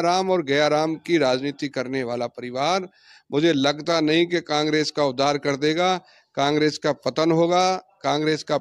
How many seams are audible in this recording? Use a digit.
0